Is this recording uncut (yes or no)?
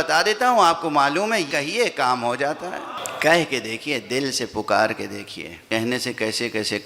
no